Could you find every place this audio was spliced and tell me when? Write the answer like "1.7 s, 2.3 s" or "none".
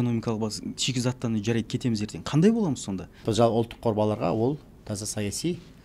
3.2 s